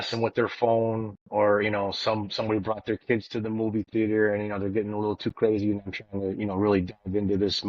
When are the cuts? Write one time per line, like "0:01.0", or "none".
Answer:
none